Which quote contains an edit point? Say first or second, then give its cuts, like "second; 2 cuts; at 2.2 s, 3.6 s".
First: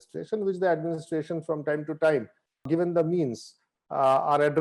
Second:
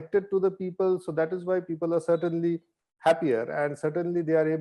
first; 1 cut; at 2.6 s